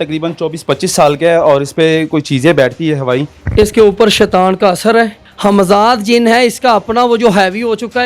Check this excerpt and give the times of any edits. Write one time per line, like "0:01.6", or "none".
0:03.4
0:05.2